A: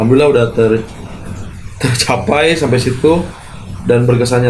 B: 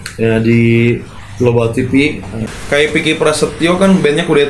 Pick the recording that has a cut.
B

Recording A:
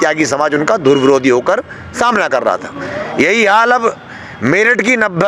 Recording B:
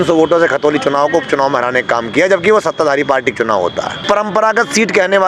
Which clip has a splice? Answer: B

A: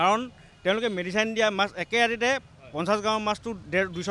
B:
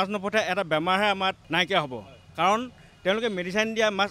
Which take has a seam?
B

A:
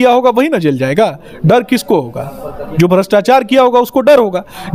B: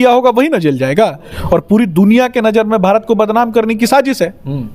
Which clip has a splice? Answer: B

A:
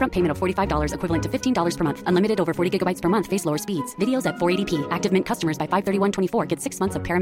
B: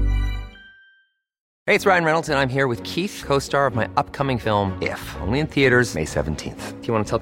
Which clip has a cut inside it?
B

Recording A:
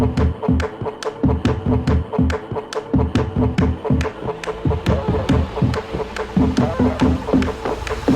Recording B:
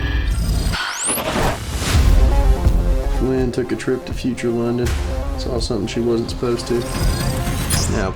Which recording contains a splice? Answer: A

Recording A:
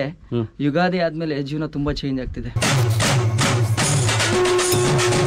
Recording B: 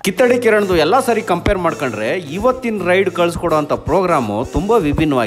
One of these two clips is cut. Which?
A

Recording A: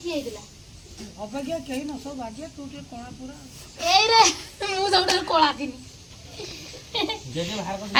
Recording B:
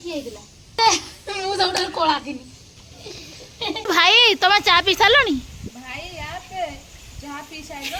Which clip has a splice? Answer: B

